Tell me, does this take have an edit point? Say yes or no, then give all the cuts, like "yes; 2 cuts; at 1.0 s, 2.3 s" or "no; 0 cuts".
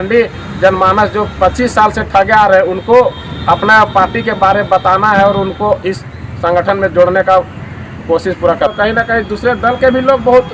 yes; 1 cut; at 8.7 s